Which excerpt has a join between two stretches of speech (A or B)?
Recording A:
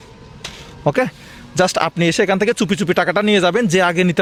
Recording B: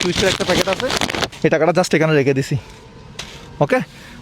B